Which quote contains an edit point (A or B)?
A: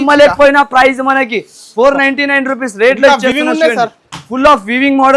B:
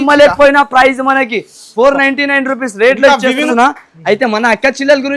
B